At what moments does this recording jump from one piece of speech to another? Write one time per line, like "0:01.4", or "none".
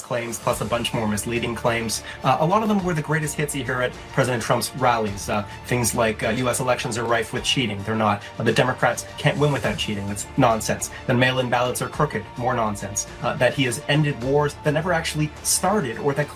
none

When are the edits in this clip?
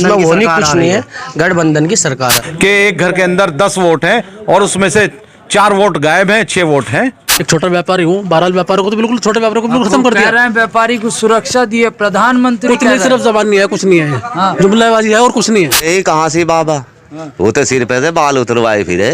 0:02.4
0:07.3
0:15.9

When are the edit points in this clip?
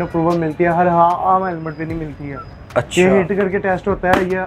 none

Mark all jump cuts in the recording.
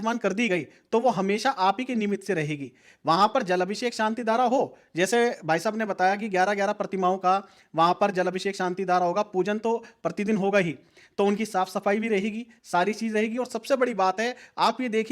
none

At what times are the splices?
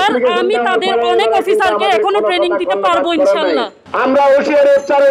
0:03.8

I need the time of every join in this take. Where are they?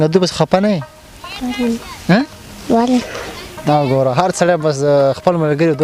none

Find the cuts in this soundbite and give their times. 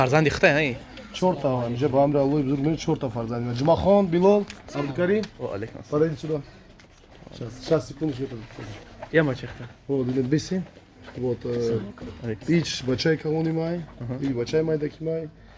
none

